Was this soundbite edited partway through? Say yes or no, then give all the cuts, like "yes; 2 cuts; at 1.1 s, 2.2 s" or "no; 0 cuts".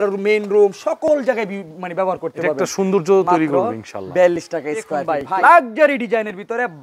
yes; 1 cut; at 5.0 s